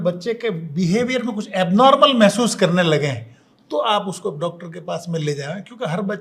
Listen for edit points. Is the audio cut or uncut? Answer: uncut